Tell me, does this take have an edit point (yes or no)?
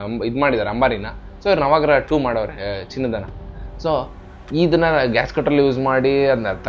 no